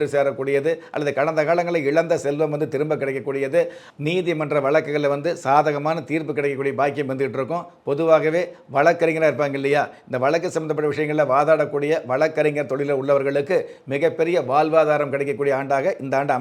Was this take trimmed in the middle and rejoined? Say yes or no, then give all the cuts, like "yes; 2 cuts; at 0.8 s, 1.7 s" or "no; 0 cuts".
yes; 1 cut; at 3.8 s